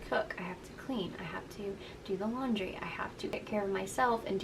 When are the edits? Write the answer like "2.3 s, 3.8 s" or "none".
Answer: 3.3 s